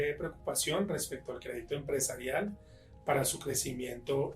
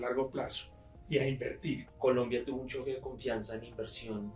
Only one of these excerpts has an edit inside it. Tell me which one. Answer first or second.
second